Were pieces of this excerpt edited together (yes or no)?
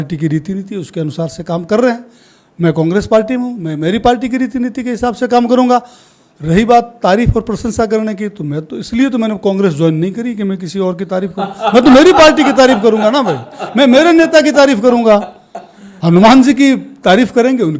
no